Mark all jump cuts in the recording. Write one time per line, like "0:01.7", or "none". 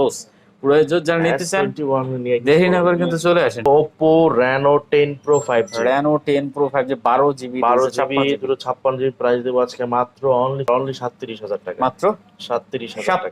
0:03.7
0:10.7